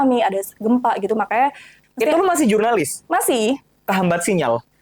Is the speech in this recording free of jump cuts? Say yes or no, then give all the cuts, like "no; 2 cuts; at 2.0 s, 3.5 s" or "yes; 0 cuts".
no; 1 cut; at 1.8 s